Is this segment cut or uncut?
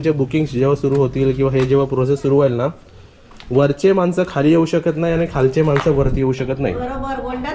uncut